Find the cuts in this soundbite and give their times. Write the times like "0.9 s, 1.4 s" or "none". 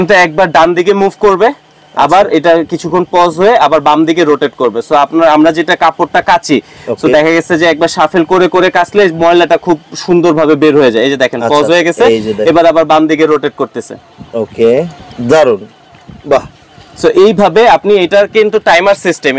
none